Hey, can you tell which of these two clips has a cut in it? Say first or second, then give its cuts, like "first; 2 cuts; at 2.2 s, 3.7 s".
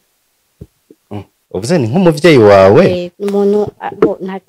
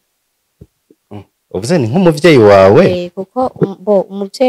first; 1 cut; at 3.1 s